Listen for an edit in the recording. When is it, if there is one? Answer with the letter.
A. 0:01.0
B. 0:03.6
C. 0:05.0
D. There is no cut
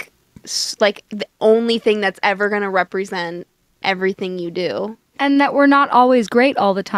C